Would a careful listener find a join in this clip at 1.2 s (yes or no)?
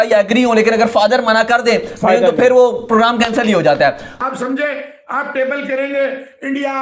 no